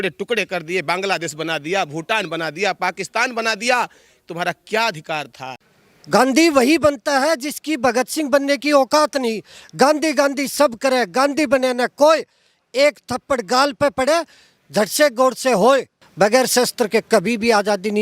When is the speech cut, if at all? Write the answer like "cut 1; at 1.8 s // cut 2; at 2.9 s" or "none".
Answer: cut 1; at 5.5 s